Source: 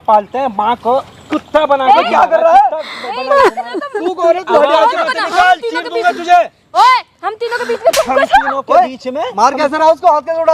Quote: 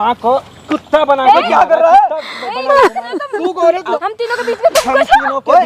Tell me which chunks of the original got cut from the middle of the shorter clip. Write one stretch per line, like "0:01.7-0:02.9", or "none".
0:04.5-0:07.1